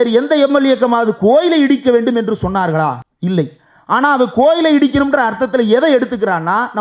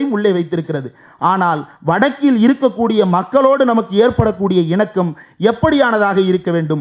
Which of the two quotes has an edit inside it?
first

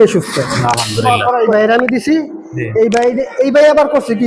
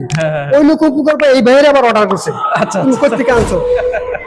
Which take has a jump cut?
first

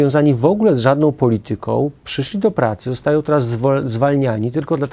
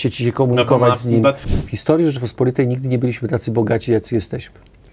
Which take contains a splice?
second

